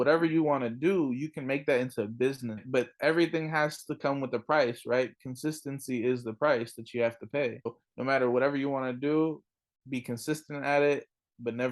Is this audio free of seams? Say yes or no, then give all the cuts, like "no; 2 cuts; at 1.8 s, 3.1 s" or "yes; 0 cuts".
no; 2 cuts; at 2.6 s, 7.9 s